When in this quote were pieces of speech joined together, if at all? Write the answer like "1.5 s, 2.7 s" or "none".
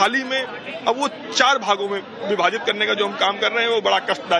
1.2 s